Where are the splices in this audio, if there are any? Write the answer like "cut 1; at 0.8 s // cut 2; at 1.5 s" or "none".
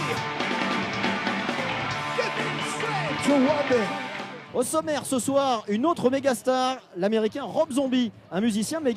cut 1; at 6.9 s

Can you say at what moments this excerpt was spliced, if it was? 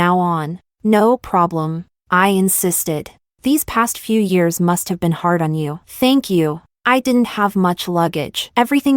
cut 1; at 6.7 s

